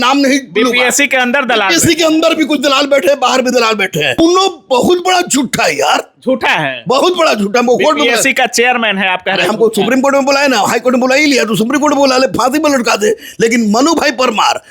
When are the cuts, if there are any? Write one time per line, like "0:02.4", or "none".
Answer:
0:04.2

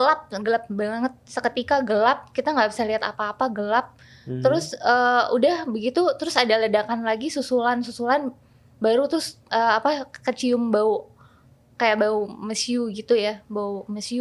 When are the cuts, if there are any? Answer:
none

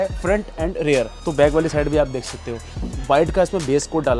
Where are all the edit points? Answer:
0:01.1
0:02.9

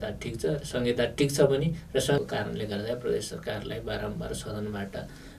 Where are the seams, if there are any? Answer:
0:02.2

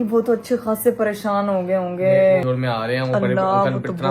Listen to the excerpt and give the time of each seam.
0:02.4

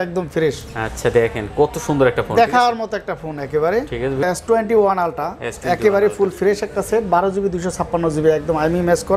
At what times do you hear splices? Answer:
0:04.2

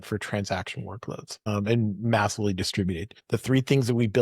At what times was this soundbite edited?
0:01.5
0:03.1

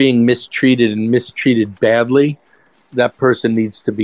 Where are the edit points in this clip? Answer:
none

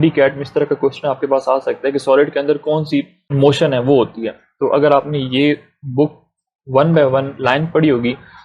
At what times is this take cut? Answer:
0:03.2

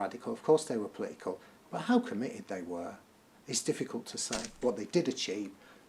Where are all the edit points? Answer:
0:04.5

